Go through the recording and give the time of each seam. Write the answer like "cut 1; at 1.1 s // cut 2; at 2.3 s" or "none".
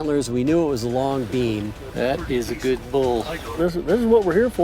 cut 1; at 1.8 s // cut 2; at 3.6 s